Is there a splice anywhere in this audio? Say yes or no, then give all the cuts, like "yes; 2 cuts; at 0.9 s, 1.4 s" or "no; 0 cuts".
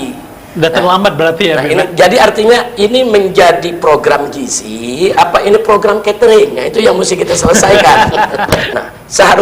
yes; 1 cut; at 8.4 s